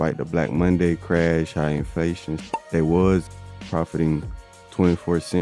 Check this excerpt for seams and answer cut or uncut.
cut